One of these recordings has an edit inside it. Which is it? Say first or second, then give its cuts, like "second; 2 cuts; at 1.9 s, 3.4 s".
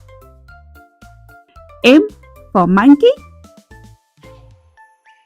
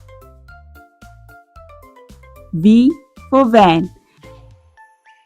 second; 2 cuts; at 1.8 s, 3.9 s